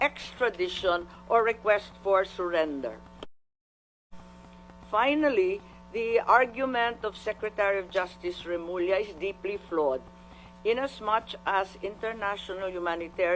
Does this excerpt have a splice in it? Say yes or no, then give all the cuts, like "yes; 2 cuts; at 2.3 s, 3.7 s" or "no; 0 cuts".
yes; 1 cut; at 3.9 s